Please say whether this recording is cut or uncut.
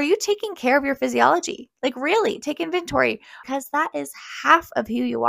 cut